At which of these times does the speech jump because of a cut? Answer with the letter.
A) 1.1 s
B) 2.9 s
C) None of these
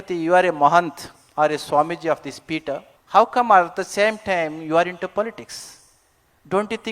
B